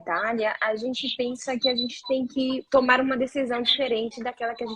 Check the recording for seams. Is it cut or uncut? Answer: cut